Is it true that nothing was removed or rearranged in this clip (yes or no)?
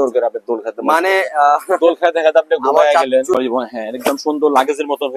no